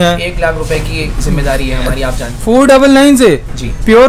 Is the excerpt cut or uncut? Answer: cut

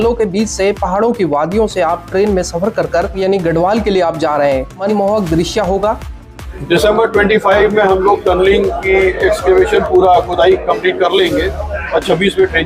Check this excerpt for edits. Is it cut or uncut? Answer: cut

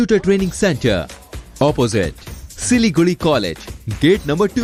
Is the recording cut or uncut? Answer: uncut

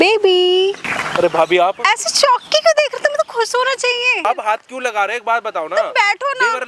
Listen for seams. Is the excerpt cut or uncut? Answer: cut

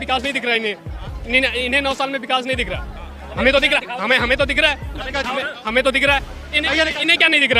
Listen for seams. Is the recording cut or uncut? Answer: uncut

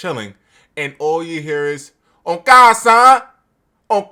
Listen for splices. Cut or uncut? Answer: uncut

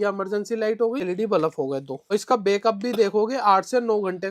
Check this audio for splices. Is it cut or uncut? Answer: cut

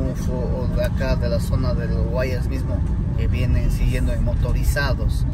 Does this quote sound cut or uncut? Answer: uncut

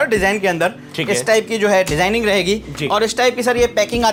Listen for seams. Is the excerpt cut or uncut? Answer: uncut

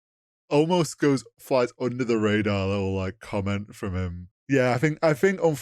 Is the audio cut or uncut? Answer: cut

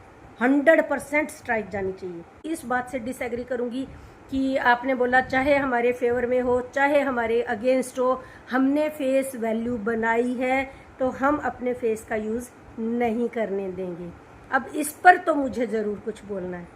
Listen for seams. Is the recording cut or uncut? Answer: cut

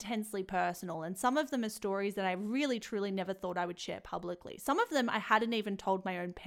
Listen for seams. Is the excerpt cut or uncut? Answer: uncut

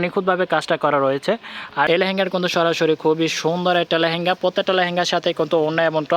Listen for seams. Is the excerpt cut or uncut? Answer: cut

